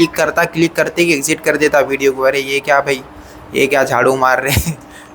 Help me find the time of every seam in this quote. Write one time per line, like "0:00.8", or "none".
none